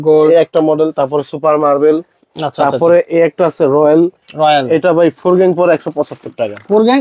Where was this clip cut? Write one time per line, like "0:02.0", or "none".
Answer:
none